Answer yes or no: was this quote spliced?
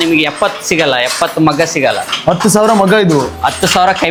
no